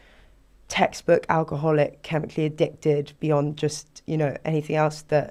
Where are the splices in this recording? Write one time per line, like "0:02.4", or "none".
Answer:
none